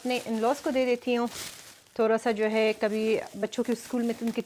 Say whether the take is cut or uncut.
uncut